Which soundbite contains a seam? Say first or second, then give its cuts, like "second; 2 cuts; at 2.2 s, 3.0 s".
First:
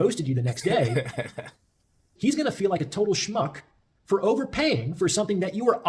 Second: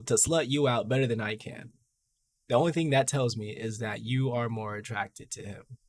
first; 1 cut; at 2.1 s